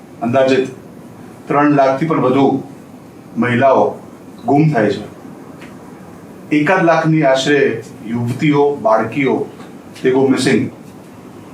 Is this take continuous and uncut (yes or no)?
yes